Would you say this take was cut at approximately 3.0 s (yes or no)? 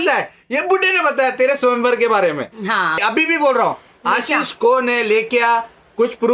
yes